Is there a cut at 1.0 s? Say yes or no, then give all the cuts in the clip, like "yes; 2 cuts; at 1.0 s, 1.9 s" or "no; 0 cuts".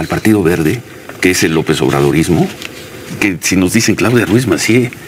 no; 1 cut; at 3.2 s